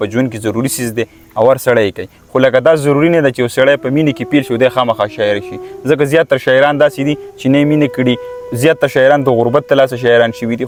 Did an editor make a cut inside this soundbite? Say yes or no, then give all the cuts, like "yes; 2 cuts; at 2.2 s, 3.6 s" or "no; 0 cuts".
no; 0 cuts